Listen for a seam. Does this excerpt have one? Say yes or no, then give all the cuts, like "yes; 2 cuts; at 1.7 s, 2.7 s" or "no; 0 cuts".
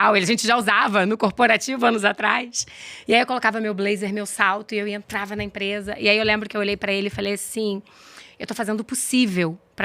no; 0 cuts